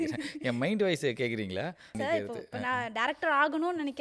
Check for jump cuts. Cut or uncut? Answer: cut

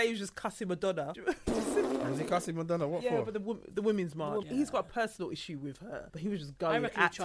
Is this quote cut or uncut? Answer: cut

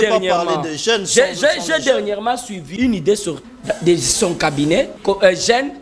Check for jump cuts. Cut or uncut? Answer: cut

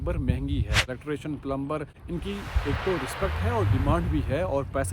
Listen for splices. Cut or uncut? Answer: cut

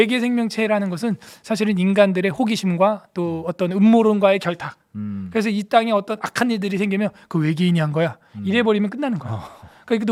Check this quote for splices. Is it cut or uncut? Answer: uncut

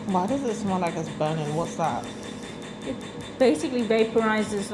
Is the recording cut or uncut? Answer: uncut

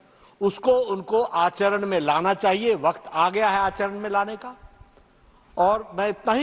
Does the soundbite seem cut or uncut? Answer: uncut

